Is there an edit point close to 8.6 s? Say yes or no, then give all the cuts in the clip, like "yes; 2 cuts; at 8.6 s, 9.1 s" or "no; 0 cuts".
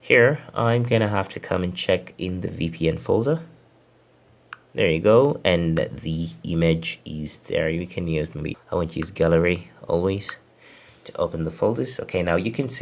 yes; 1 cut; at 8.6 s